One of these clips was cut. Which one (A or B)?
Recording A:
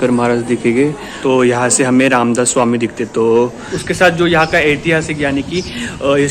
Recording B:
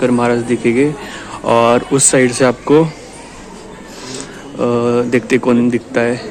A